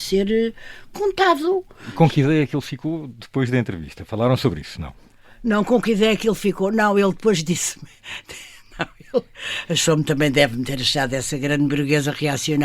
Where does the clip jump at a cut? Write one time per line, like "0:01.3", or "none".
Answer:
0:01.9